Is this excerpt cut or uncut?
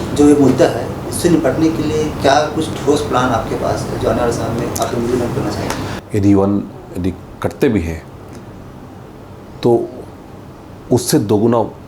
cut